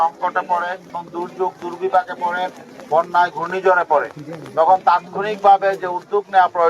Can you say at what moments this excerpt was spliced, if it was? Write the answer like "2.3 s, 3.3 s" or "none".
0.9 s